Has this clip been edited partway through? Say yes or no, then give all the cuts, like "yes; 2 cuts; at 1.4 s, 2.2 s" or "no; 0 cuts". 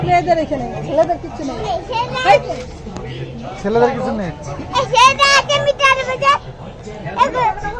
no; 0 cuts